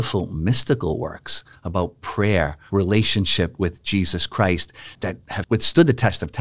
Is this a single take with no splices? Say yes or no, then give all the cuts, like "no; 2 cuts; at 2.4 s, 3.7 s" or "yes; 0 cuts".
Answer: no; 2 cuts; at 2.6 s, 4.9 s